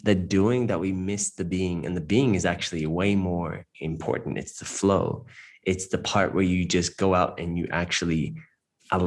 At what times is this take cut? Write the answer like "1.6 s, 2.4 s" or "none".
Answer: none